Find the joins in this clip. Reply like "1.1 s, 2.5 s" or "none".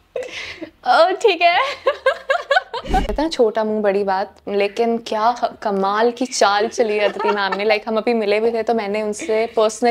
3.1 s